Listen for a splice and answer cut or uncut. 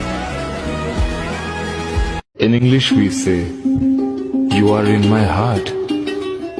uncut